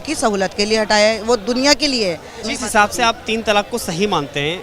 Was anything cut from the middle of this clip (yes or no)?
yes